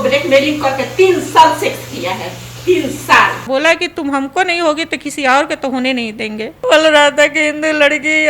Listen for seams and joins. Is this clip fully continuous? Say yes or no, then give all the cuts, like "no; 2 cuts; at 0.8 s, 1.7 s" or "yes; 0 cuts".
no; 2 cuts; at 3.4 s, 6.6 s